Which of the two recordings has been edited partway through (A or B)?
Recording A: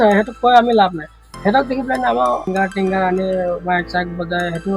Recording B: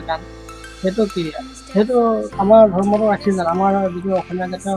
A